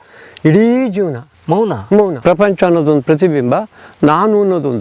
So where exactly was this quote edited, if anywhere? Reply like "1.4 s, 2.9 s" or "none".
1.3 s, 2.2 s